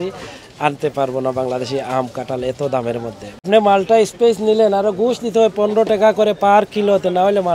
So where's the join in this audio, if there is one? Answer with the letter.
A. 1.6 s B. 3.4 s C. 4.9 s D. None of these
B